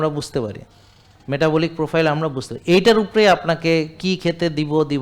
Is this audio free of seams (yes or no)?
yes